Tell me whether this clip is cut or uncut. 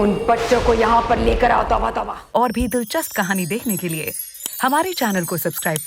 cut